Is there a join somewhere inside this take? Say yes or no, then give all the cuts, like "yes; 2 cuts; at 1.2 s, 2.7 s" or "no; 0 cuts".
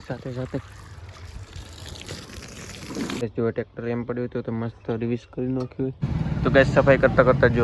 yes; 2 cuts; at 3.2 s, 6.0 s